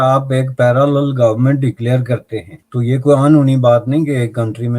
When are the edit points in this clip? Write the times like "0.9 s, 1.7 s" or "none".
2.6 s